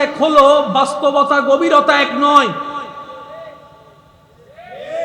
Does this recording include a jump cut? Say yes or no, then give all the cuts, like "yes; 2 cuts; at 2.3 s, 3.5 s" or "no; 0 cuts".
no; 0 cuts